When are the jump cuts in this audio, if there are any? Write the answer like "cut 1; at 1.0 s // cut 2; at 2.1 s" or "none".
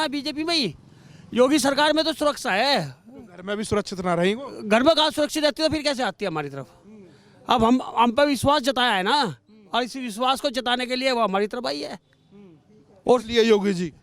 none